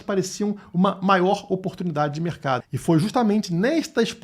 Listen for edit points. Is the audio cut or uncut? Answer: cut